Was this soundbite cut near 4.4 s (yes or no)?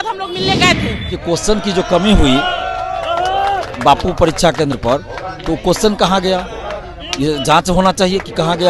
no